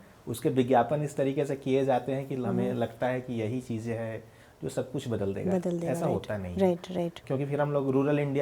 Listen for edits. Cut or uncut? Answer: cut